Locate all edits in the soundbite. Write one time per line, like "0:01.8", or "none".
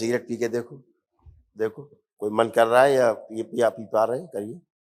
none